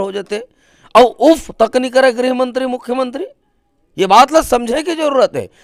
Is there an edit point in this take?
no; 0 cuts

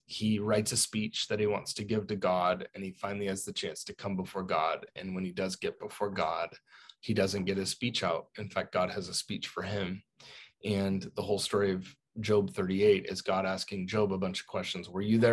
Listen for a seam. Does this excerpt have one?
no; 0 cuts

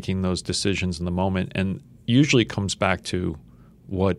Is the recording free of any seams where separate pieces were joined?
yes; 0 cuts

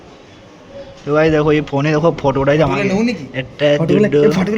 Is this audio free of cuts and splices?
yes; 0 cuts

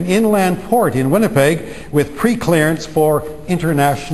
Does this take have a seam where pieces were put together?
no; 0 cuts

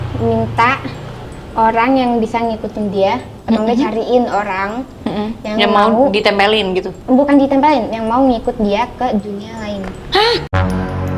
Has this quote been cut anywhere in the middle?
no; 0 cuts

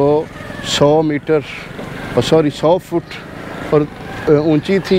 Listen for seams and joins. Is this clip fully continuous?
yes; 0 cuts

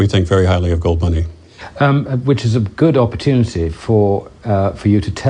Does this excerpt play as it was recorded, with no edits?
no; 1 cut; at 3.2 s

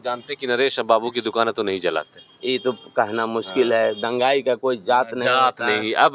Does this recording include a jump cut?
no; 0 cuts

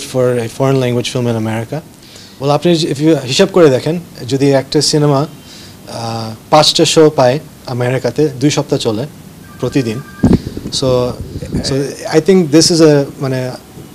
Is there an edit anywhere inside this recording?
yes; 2 cuts; at 2.3 s, 11.2 s

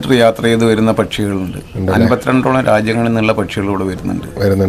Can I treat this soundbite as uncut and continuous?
yes; 0 cuts

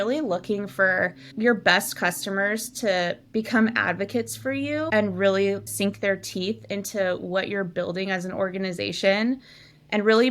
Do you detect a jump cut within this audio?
yes; 2 cuts; at 1.2 s, 4.9 s

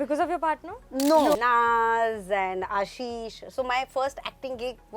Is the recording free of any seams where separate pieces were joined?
no; 1 cut; at 1.4 s

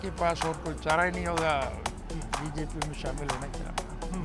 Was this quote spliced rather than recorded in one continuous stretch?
no; 0 cuts

